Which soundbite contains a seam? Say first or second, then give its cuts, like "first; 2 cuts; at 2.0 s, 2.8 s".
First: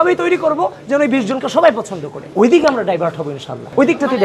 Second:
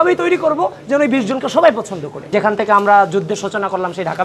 second; 1 cut; at 2.2 s